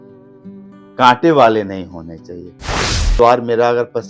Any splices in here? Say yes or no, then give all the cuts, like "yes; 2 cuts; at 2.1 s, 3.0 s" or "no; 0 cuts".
yes; 1 cut; at 2.7 s